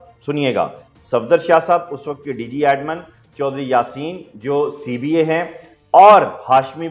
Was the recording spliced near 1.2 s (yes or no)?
no